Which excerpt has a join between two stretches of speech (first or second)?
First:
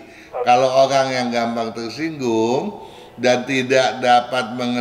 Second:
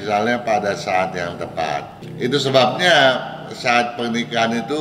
second